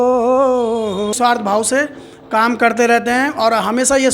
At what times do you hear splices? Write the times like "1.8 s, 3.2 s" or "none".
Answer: 1.1 s